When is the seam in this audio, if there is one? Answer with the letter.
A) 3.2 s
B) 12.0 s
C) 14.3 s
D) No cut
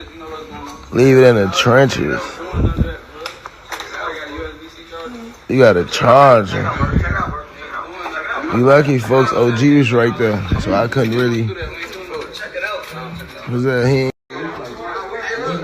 C